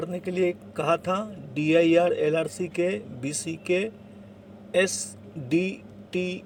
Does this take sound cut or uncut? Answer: uncut